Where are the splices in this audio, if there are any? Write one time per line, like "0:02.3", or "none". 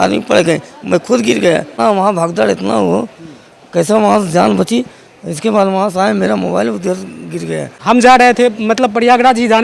0:01.7
0:07.7